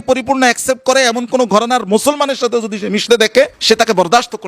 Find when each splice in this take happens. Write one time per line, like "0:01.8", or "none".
0:03.6

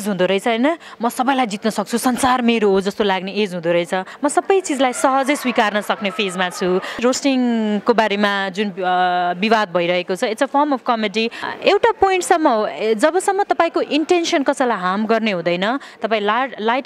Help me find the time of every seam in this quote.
0:04.1
0:07.0
0:11.4

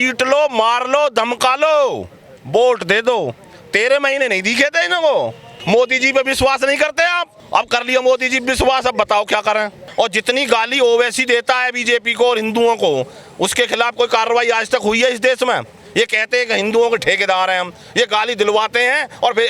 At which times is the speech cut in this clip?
0:05.5
0:07.3
0:09.8

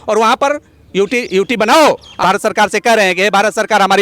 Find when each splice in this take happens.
0:02.2

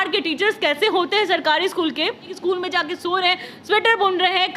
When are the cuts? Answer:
0:02.3

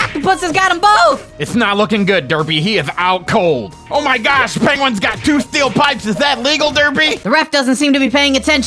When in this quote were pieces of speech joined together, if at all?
0:01.3
0:03.8

